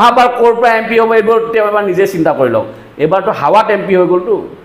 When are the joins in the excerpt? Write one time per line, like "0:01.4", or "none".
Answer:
none